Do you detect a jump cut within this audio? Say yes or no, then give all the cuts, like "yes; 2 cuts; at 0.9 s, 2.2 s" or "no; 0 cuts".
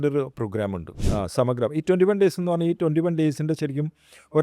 yes; 1 cut; at 0.9 s